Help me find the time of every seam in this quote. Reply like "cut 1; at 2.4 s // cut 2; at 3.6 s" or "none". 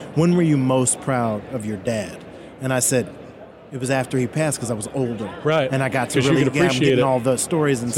none